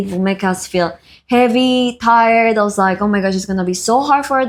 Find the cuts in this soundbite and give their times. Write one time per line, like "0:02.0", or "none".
none